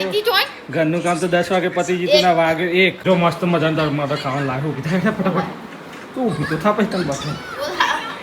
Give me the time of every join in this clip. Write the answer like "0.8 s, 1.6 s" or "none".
3.0 s